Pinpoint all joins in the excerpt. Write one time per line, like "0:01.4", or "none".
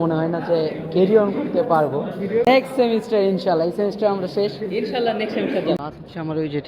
0:02.5
0:05.8